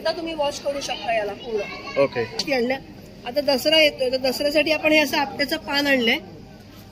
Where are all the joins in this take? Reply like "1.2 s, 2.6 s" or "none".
2.4 s